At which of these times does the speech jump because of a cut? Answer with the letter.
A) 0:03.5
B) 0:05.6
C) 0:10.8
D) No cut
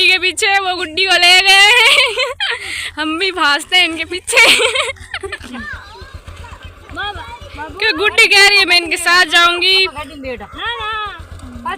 B